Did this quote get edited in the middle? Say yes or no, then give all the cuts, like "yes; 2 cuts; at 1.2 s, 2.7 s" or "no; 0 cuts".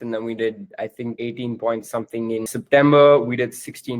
yes; 2 cuts; at 1.2 s, 2.5 s